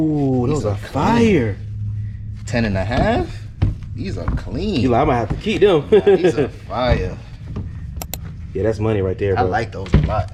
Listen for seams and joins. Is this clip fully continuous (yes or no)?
yes